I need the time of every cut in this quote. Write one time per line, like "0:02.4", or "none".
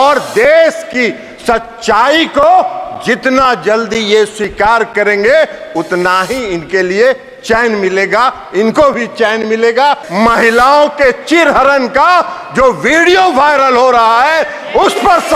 0:10.1